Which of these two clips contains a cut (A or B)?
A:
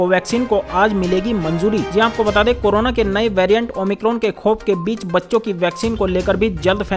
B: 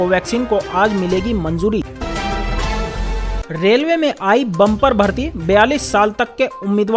B